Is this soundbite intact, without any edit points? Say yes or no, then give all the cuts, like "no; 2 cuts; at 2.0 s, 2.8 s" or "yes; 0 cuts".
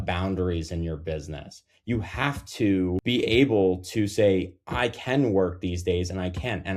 no; 1 cut; at 3.0 s